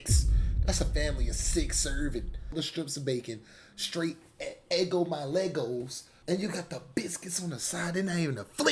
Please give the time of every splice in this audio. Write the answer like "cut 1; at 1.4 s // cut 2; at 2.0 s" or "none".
cut 1; at 2.5 s // cut 2; at 6.2 s